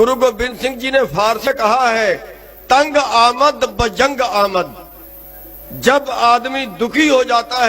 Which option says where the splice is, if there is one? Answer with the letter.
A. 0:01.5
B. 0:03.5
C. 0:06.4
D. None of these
A